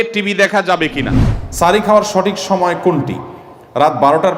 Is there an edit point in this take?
yes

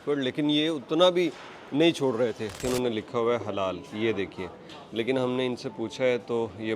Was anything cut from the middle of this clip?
yes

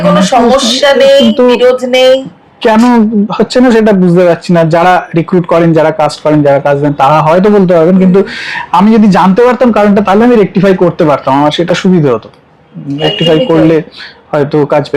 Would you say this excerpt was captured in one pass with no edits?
yes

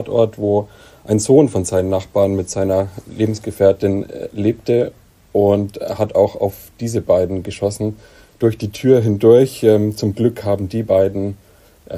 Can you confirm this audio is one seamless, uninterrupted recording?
yes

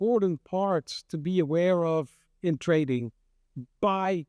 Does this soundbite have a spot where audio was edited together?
no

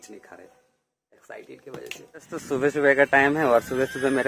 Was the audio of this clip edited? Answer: yes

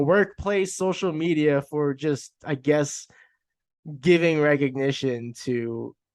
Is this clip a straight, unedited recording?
yes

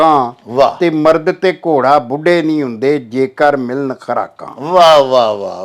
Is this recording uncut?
yes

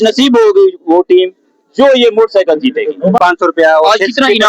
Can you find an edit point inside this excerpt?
yes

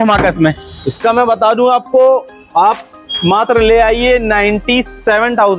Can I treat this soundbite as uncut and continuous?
yes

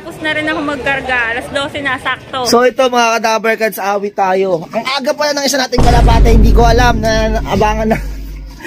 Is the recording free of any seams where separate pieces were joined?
no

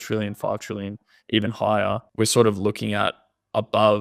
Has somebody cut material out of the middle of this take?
yes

